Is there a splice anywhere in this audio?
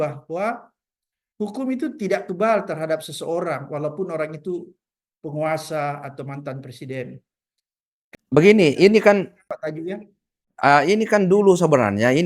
no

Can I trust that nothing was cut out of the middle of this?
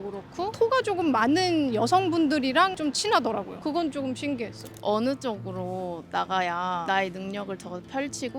no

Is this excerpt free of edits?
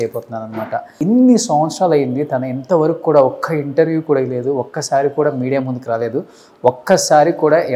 no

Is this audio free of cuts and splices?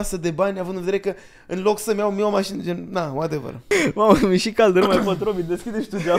no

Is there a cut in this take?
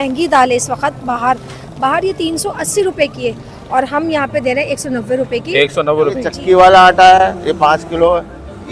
yes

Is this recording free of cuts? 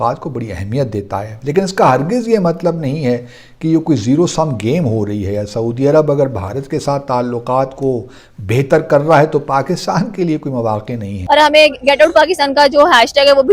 no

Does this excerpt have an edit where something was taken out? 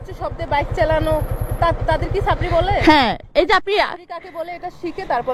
no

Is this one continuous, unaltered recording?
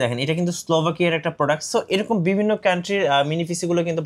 yes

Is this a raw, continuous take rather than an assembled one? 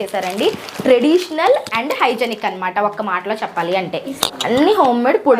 no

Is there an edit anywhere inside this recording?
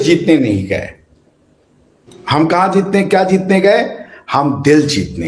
no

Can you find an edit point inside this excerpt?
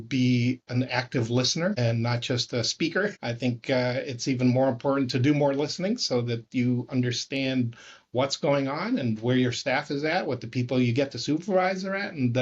yes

